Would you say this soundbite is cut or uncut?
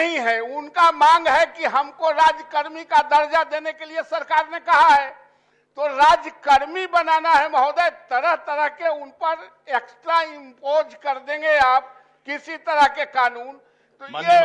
uncut